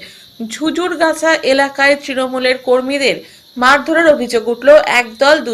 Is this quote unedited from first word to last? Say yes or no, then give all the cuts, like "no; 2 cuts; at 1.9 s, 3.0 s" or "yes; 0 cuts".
yes; 0 cuts